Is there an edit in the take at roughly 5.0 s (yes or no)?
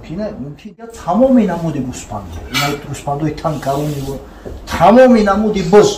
no